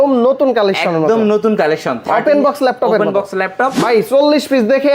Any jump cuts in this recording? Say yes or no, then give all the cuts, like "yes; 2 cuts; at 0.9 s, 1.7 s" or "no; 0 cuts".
yes; 1 cut; at 3.8 s